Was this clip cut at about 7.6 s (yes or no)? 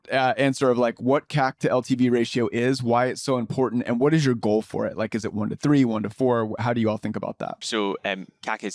yes